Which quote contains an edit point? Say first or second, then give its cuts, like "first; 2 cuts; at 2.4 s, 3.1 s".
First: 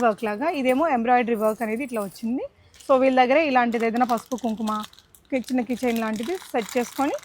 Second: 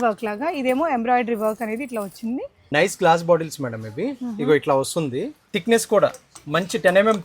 second; 2 cuts; at 2.6 s, 5.4 s